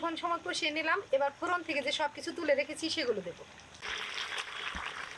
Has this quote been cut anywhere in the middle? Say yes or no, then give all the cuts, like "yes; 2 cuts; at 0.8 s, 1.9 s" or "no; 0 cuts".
no; 0 cuts